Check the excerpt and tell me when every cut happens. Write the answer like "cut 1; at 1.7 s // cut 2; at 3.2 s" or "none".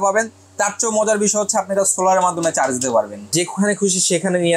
cut 1; at 3.3 s